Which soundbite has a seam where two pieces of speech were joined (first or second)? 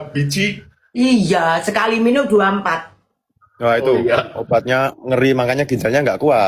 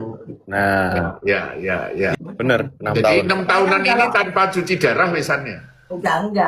second